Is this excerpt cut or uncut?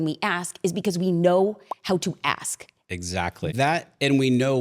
cut